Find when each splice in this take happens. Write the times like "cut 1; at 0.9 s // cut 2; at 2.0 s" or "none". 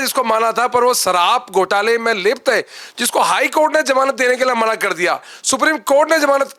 none